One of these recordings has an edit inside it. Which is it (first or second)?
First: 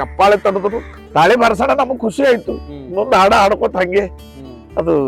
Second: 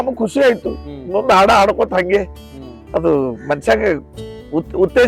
first